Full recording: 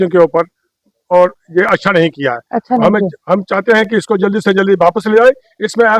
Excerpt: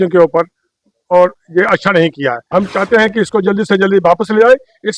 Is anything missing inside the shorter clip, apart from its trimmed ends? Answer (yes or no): yes